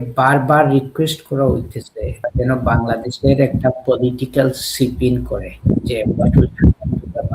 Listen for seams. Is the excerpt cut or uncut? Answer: cut